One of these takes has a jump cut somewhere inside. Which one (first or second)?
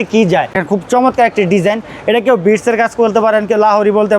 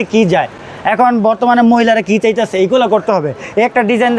first